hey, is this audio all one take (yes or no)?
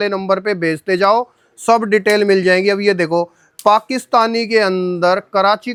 yes